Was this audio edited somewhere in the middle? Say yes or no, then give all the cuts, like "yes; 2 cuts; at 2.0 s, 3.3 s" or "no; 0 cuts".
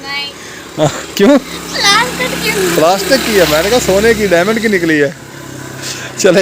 no; 0 cuts